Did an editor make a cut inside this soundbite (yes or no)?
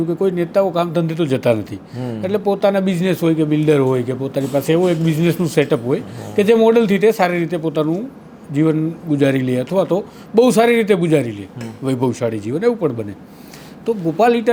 no